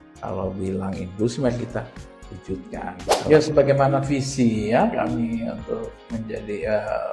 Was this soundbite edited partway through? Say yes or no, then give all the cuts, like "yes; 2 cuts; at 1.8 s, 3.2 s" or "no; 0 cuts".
yes; 1 cut; at 3.3 s